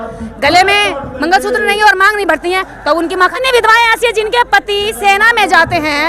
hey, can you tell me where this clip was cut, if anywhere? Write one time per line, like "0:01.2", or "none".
0:03.3

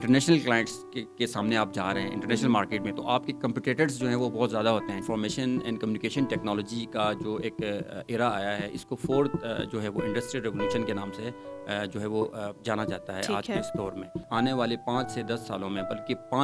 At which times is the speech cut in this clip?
0:05.0
0:14.3

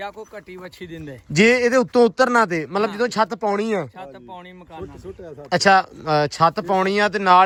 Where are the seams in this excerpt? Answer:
none

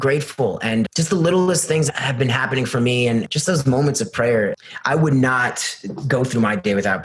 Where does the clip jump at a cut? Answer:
0:00.9
0:01.9
0:03.3
0:04.6

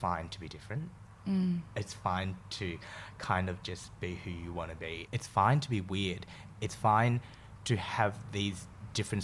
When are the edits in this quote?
none

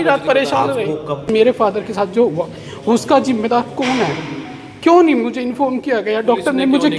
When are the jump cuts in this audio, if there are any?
0:01.3

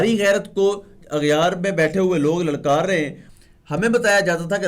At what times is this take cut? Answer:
0:00.9
0:03.2

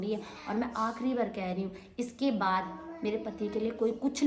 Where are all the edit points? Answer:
none

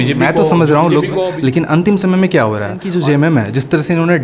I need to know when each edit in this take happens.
0:01.3
0:02.9

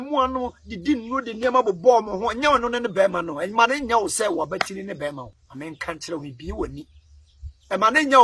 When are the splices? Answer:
0:05.4

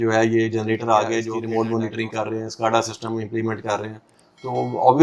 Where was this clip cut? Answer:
0:01.3

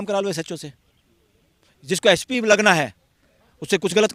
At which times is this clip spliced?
none

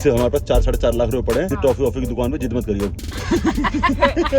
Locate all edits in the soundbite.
0:01.5

